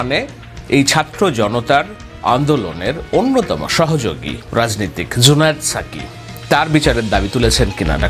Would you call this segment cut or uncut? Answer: uncut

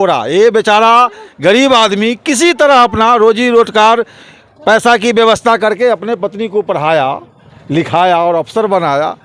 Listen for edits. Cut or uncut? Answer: uncut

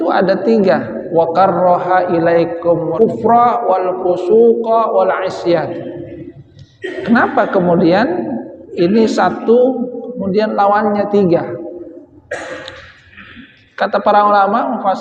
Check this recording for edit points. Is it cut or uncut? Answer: cut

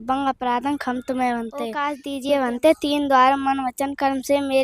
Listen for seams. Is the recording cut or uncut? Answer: cut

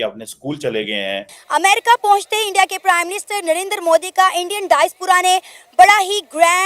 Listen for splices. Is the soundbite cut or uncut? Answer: cut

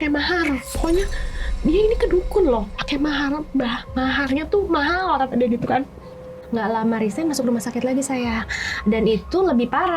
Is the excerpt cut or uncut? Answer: cut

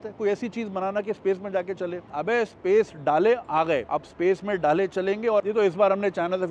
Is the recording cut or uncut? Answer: cut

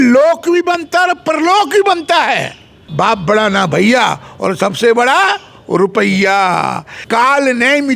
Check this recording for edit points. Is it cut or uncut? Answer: cut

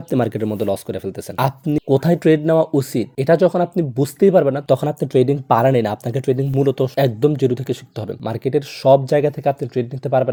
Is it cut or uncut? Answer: uncut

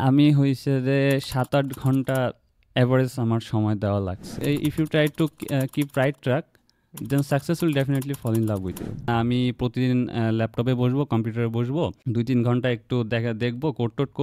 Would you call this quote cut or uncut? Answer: cut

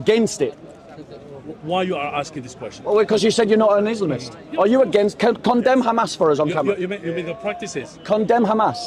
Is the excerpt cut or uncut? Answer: uncut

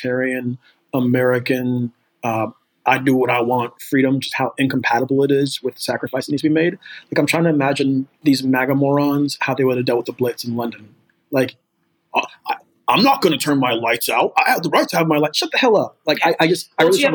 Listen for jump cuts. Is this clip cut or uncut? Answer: cut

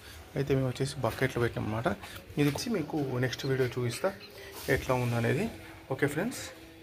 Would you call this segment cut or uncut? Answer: cut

